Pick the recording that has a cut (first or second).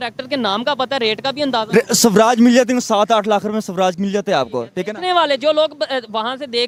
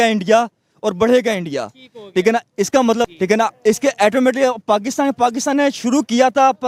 second